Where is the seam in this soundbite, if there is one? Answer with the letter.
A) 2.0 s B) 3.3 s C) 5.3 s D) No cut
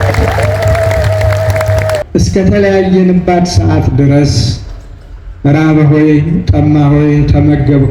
A